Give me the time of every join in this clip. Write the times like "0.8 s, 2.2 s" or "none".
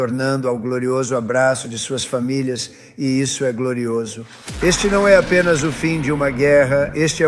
4.4 s